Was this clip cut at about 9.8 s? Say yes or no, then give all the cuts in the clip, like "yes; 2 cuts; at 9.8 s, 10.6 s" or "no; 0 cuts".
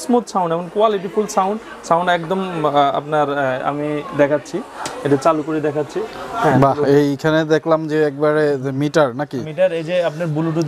no; 0 cuts